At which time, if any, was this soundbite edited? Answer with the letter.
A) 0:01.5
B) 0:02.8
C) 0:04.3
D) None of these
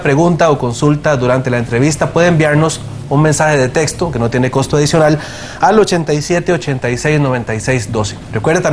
A